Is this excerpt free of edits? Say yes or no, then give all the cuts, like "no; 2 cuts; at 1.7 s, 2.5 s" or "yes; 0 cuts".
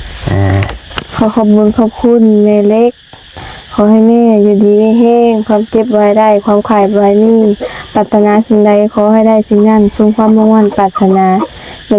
yes; 0 cuts